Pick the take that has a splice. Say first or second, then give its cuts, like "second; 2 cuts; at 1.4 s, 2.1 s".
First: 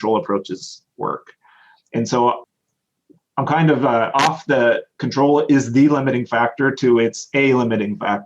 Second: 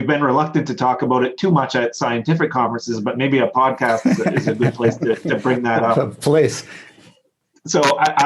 first; 1 cut; at 2.5 s